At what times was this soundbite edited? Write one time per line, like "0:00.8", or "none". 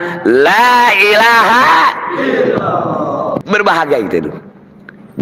0:03.4